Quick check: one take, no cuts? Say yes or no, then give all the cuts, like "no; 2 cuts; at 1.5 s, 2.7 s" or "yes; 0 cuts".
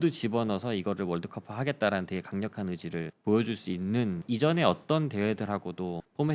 no; 1 cut; at 4.2 s